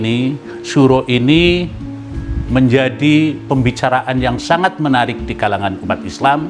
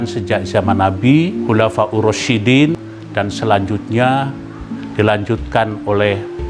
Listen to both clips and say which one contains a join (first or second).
second